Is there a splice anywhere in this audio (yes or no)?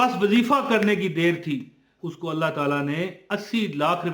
yes